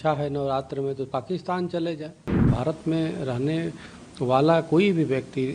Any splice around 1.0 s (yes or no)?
no